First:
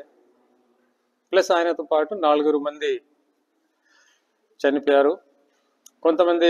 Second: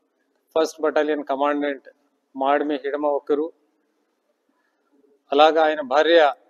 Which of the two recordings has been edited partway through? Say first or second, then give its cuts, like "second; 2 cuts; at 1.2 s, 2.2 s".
second; 1 cut; at 5.6 s